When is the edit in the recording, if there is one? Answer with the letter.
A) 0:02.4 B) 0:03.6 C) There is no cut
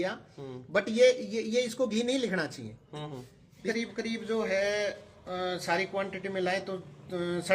B